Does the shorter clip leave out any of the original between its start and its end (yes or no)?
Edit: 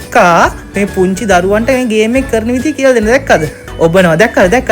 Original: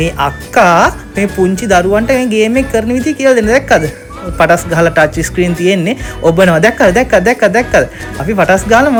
yes